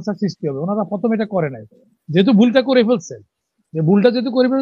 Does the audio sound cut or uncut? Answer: uncut